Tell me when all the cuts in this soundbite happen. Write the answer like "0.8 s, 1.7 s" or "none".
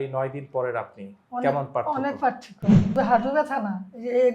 2.8 s